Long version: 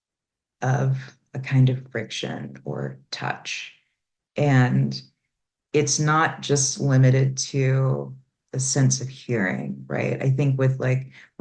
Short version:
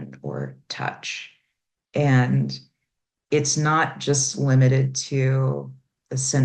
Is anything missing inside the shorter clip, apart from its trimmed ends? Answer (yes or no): no